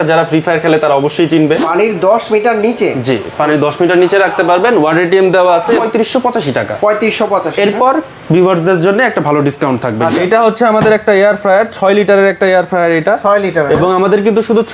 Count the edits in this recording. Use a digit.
3